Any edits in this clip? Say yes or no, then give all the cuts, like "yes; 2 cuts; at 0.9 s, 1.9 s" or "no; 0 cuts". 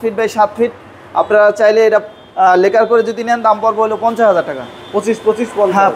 no; 0 cuts